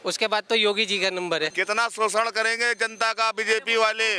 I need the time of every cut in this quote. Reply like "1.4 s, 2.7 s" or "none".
1.5 s